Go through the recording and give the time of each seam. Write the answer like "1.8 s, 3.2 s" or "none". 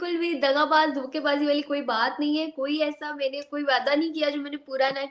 none

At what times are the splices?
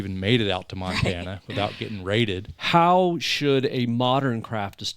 2.5 s

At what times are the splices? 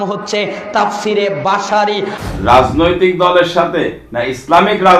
2.1 s

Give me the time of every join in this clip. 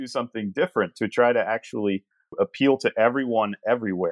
2.3 s

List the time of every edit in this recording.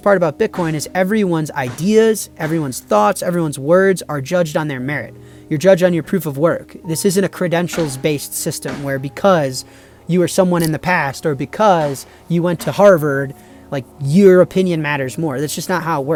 none

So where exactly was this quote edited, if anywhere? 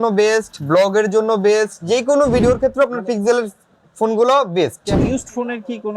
2.4 s, 5.0 s

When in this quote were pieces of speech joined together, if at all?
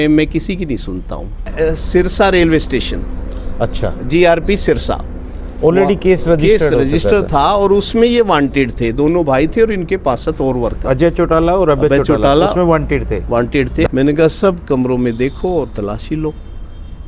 1.5 s, 13.9 s

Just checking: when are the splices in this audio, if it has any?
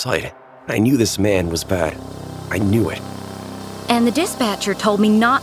3.5 s

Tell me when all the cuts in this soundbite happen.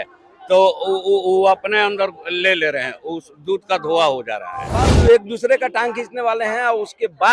4.9 s

